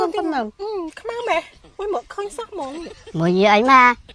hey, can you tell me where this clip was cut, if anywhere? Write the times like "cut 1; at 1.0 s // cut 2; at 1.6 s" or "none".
none